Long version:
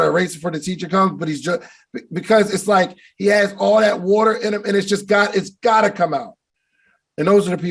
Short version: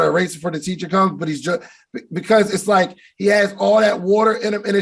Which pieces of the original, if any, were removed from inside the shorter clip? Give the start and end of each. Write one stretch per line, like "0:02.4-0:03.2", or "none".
none